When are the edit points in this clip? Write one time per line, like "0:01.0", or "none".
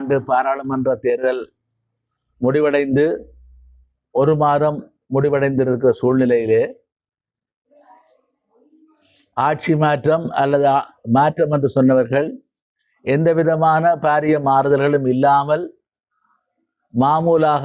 none